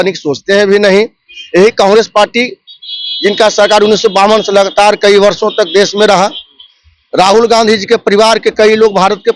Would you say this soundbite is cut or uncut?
uncut